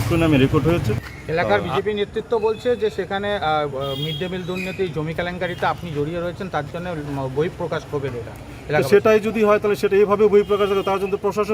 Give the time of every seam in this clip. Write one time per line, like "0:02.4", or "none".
0:01.2